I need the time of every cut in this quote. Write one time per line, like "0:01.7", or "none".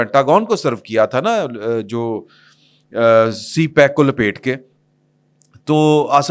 none